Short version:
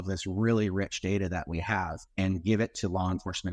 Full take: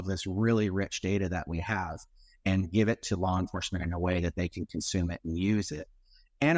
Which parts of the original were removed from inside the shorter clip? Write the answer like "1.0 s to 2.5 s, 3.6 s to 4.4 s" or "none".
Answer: 2.0 s to 2.3 s